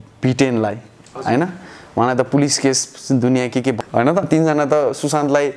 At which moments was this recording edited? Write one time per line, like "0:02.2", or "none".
0:04.1